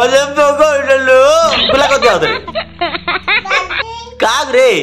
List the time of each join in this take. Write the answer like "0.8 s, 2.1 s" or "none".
none